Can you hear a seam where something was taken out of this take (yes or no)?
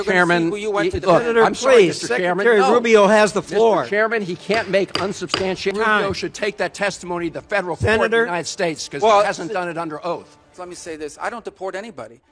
yes